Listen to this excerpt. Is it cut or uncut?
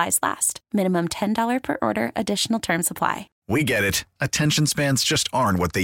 cut